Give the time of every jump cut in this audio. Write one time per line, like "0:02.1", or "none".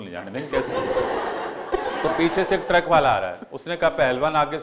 0:01.7